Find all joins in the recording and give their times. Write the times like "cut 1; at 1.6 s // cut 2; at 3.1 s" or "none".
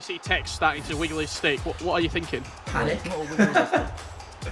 cut 1; at 2.6 s